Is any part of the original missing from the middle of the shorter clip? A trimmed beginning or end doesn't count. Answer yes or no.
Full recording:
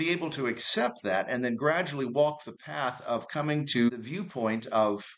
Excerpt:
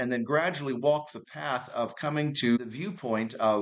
no